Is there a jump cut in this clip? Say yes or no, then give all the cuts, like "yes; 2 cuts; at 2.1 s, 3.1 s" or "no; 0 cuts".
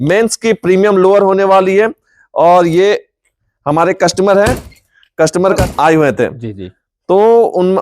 yes; 1 cut; at 5.6 s